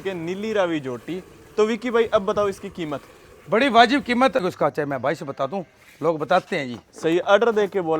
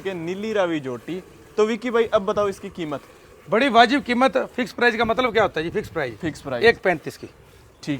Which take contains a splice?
first; 1 cut; at 4.4 s

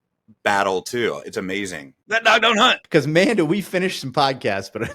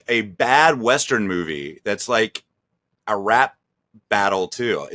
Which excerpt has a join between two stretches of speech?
first; 1 cut; at 2.4 s

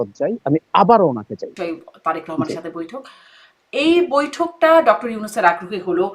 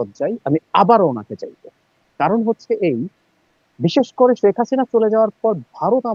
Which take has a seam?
first; 1 cut; at 1.6 s

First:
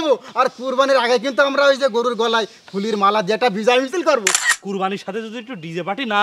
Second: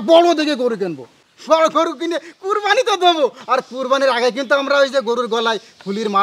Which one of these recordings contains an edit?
first; 1 cut; at 4.3 s

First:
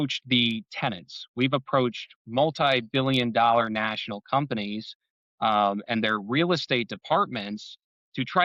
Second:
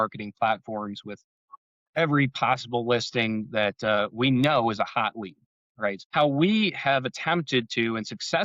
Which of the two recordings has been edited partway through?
second; 1 cut; at 6.0 s

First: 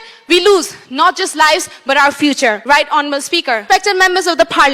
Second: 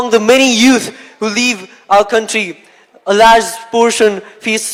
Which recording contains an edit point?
first; 2 cuts; at 2.6 s, 3.6 s

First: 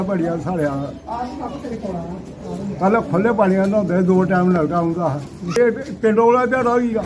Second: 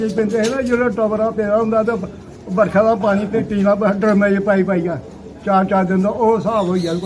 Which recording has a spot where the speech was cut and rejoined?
first; 1 cut; at 5.6 s

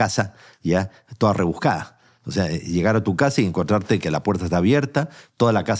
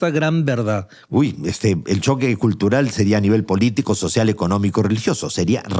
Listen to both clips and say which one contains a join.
second; 1 cut; at 0.9 s

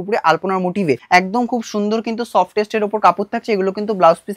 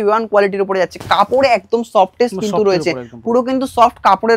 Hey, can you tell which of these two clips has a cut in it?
first; 1 cut; at 1.0 s

